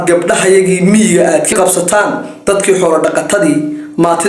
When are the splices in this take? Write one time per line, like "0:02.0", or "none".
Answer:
0:01.5

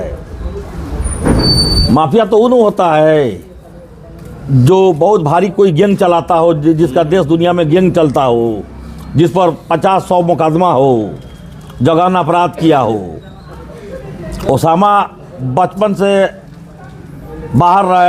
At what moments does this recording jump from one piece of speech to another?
0:01.8

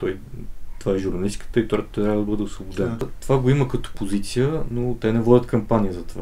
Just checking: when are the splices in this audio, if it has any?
0:03.1

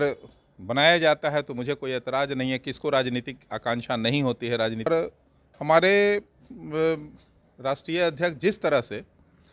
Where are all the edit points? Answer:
0:04.9

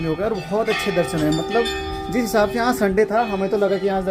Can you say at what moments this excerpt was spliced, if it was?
none

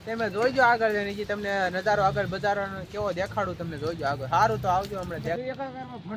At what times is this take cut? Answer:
none

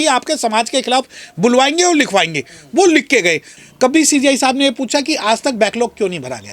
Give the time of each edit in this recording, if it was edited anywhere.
0:03.5

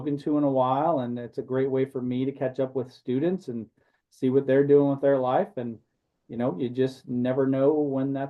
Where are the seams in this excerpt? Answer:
none

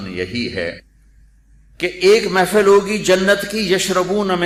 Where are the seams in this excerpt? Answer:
none

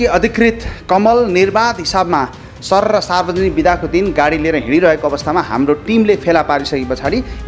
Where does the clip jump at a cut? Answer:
none

